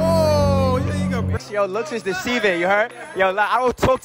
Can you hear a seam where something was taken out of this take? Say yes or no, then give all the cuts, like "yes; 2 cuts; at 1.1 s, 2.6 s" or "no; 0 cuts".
yes; 1 cut; at 1.4 s